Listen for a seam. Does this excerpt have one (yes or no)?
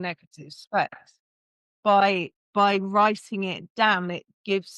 yes